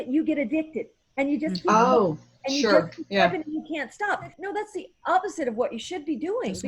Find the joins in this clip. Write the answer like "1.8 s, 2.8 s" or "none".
4.4 s

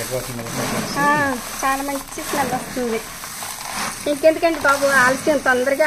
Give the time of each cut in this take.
3.6 s

